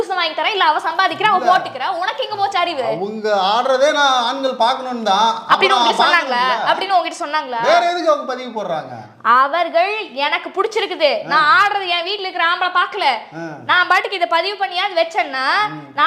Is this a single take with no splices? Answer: yes; 0 cuts

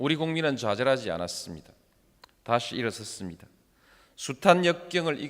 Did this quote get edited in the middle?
yes; 1 cut; at 4.1 s

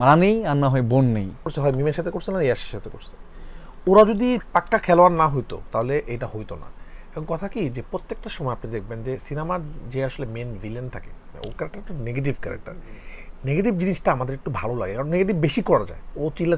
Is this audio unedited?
no; 1 cut; at 1.4 s

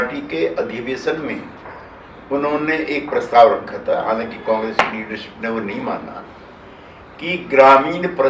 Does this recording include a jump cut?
no; 0 cuts

